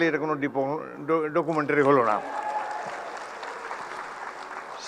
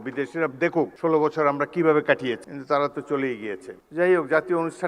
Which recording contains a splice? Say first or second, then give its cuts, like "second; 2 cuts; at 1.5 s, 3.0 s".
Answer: second; 3 cuts; at 0.9 s, 2.5 s, 3.7 s